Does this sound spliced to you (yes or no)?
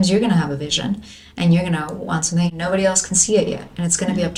no